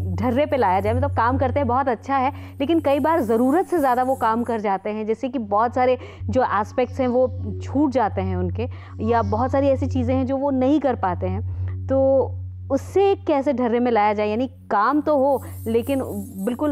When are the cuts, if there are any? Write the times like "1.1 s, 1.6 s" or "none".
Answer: none